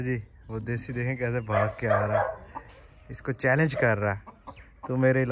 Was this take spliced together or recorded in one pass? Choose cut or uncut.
uncut